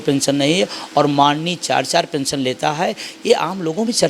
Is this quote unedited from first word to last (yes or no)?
yes